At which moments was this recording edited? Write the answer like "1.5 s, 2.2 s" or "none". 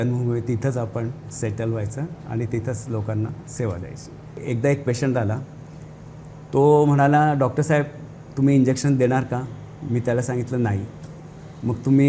4.4 s

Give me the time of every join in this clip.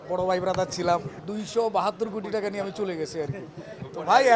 1.2 s

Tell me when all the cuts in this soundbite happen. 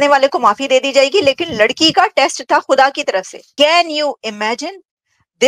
3.4 s

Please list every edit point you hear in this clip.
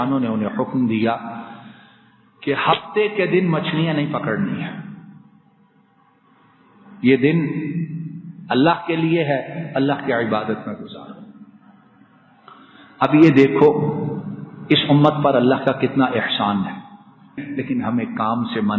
17.3 s

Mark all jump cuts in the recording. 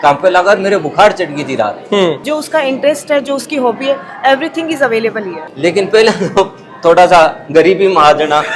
2.2 s, 5.5 s

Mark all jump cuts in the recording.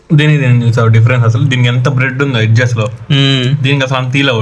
none

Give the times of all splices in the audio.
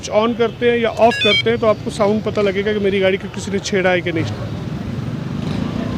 4.3 s

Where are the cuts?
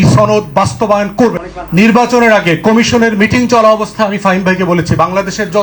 1.4 s

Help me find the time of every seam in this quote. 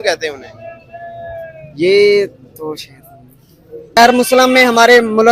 4.0 s

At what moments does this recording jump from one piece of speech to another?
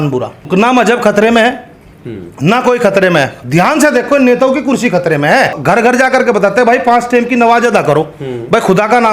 5.6 s

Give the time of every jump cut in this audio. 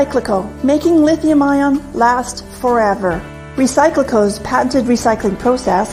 2.3 s

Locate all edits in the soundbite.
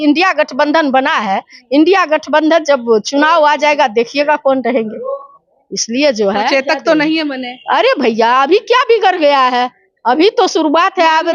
none

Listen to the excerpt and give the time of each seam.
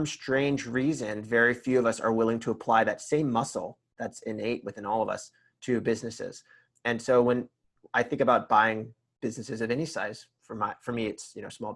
none

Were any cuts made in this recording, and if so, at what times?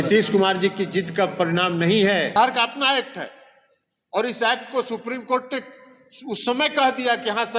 2.4 s

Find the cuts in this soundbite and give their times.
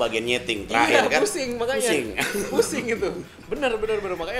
none

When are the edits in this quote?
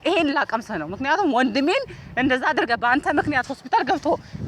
none

